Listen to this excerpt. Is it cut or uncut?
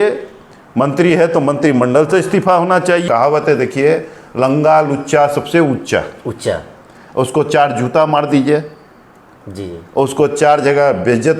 cut